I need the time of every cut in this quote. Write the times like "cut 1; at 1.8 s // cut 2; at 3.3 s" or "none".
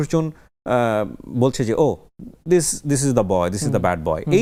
none

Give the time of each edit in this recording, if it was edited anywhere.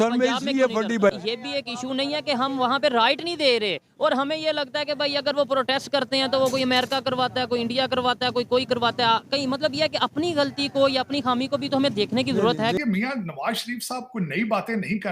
cut 1; at 1.1 s // cut 2; at 12.8 s

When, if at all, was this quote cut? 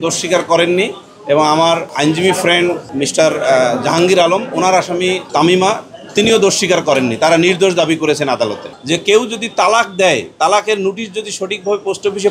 cut 1; at 1.9 s // cut 2; at 2.9 s // cut 3; at 5.2 s // cut 4; at 8.7 s

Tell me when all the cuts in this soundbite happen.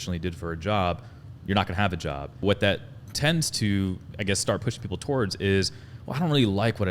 cut 1; at 2.4 s

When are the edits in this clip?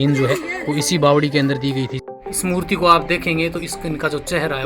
cut 1; at 2.0 s

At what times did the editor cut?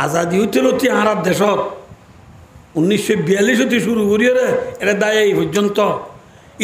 none

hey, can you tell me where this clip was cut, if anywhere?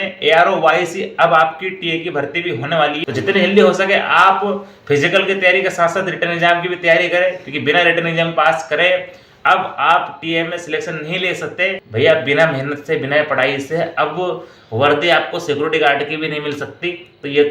cut 1; at 3.0 s // cut 2; at 11.8 s

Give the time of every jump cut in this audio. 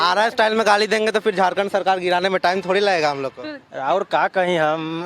cut 1; at 3.4 s

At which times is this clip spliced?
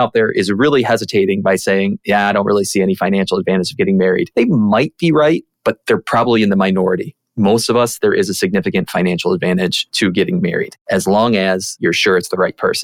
cut 1; at 4.3 s // cut 2; at 9.8 s // cut 3; at 10.8 s // cut 4; at 11.7 s

